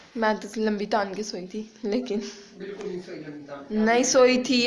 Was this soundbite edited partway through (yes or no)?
no